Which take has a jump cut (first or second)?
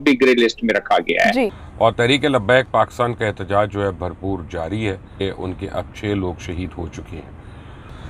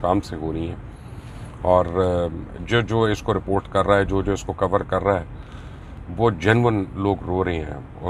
first